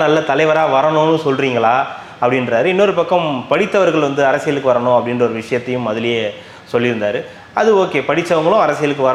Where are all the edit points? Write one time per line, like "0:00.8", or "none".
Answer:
none